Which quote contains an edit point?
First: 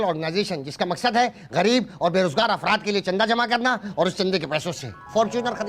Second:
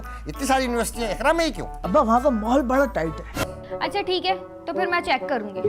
second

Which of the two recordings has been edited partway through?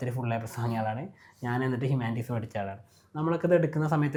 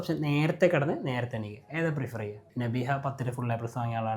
second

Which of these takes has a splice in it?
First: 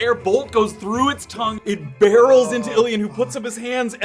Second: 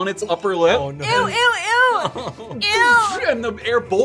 first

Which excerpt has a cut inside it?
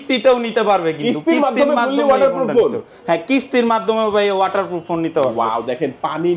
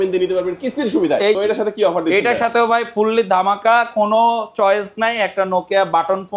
second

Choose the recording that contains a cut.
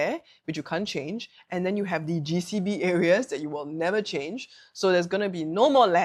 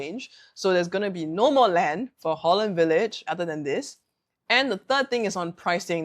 second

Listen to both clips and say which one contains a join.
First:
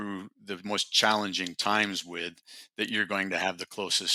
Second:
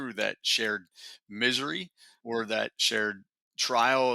second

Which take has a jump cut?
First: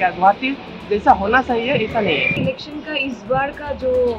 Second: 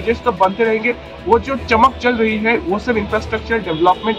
first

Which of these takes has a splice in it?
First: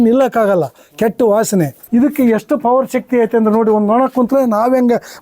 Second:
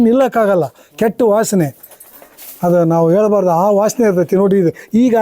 first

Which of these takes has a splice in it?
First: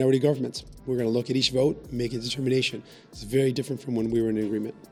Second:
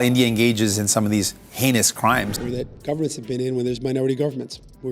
second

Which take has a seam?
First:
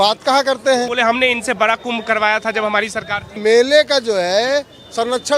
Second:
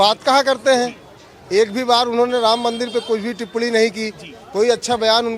first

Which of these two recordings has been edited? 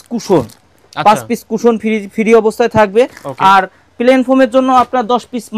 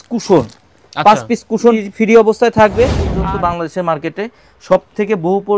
second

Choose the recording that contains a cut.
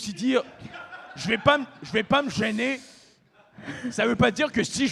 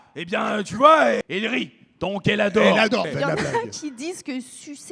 second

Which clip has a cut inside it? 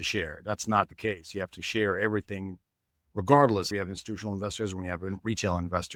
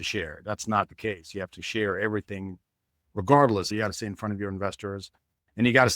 second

